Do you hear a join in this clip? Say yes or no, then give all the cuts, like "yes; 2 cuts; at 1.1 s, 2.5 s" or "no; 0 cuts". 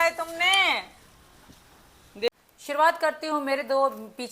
yes; 1 cut; at 2.3 s